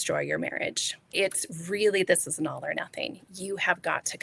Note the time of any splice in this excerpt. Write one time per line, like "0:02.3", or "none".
0:01.1